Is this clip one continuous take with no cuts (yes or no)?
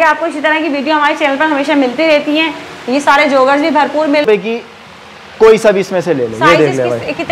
no